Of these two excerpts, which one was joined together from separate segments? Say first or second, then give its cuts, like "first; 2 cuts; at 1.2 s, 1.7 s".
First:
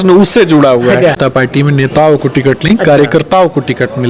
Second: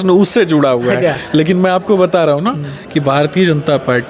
first; 1 cut; at 1.2 s